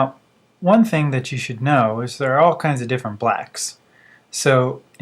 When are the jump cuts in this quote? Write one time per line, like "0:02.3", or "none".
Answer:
0:02.0